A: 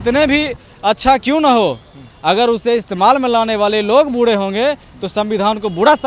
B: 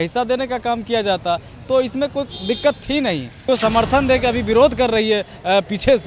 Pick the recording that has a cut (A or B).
B